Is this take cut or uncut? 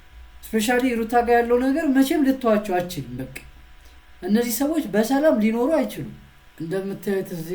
cut